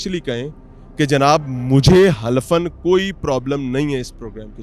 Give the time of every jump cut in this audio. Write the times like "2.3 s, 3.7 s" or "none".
none